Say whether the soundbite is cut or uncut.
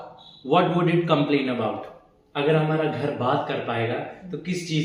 uncut